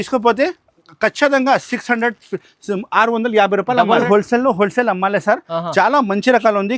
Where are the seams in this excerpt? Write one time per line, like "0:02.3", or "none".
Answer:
0:04.0